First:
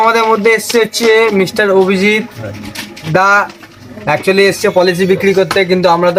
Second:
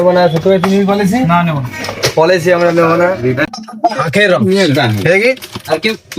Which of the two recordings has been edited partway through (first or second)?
second